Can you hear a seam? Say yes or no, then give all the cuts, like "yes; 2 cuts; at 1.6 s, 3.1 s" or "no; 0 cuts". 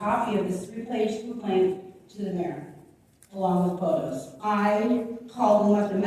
yes; 1 cut; at 4.3 s